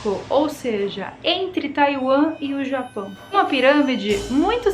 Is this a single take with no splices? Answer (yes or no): no